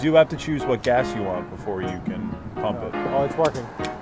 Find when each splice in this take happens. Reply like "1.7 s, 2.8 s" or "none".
3.0 s